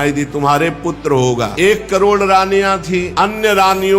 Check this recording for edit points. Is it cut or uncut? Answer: cut